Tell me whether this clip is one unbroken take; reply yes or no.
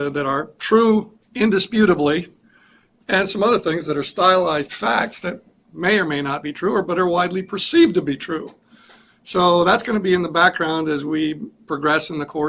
no